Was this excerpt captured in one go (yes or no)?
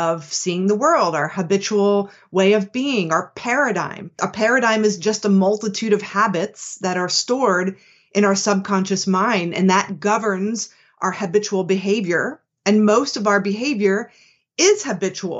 no